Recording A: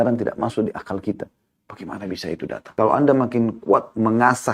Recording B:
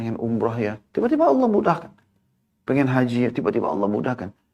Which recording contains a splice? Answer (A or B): A